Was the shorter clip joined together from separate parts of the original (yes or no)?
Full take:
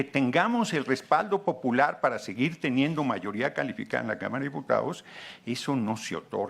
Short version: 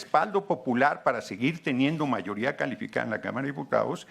no